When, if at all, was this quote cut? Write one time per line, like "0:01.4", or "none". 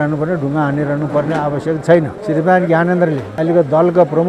0:02.1
0:03.3